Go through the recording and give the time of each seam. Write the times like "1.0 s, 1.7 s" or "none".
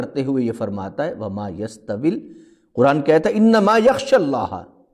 none